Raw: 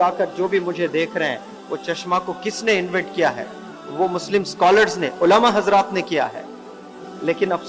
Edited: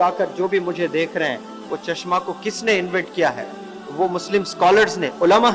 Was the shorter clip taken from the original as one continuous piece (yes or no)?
yes